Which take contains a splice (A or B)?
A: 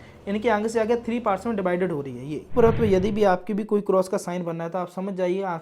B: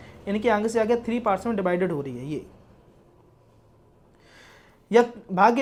A